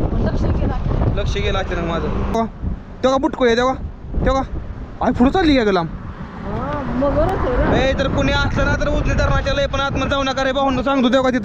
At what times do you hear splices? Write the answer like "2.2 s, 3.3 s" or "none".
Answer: 2.3 s